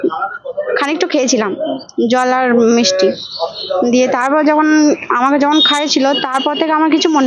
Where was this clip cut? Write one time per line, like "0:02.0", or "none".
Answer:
none